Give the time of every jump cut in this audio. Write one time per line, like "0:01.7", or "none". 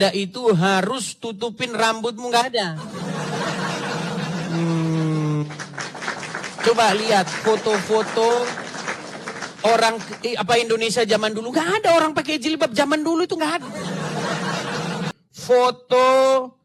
0:15.1